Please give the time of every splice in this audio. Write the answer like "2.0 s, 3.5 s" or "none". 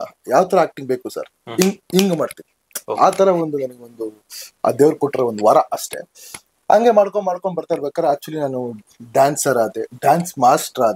none